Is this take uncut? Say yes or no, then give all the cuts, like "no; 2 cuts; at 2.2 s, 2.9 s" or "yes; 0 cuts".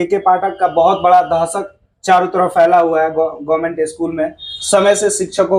yes; 0 cuts